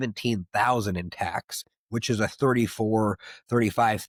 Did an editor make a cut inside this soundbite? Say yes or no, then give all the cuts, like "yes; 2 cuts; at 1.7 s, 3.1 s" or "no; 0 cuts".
no; 0 cuts